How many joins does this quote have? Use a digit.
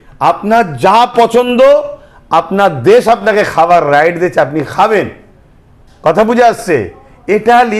0